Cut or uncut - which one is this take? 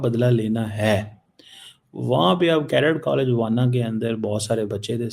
uncut